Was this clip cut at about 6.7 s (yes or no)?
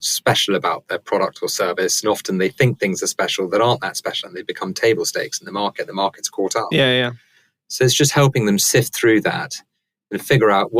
no